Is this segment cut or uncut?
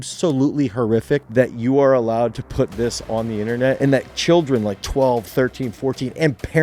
cut